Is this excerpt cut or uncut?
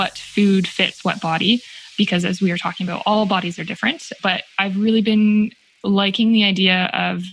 uncut